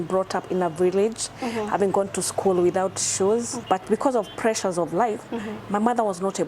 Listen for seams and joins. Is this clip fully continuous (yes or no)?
no